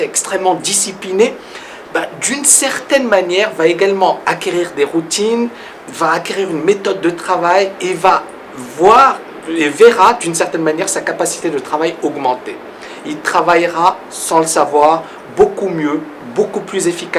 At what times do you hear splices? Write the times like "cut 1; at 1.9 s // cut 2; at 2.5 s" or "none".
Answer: none